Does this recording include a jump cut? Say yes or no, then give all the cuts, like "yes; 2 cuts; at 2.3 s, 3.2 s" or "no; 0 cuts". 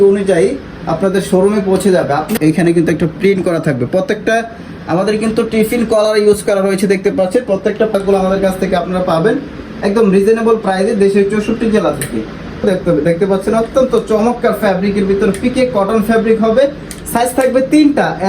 yes; 3 cuts; at 2.3 s, 7.9 s, 12.6 s